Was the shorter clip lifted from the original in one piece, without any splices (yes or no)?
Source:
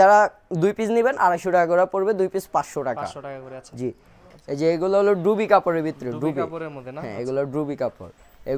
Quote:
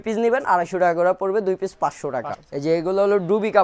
no